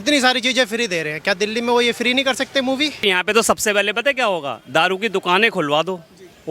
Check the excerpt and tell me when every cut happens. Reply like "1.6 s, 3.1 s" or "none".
3.0 s